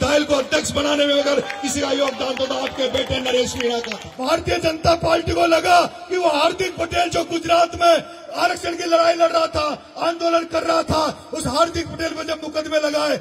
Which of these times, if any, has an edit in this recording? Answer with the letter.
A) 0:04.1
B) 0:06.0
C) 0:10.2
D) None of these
A